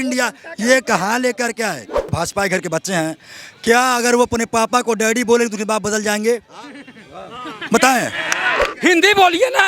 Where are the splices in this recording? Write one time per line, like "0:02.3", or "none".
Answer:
0:02.0
0:08.7